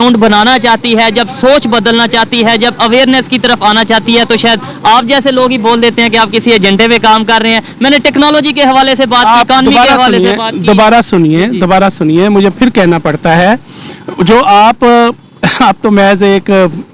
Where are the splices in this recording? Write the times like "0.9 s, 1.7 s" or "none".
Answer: none